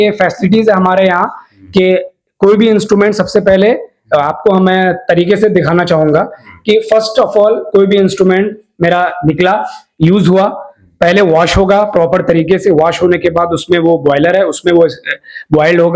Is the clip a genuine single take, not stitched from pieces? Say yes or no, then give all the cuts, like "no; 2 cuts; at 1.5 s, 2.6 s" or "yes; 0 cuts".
yes; 0 cuts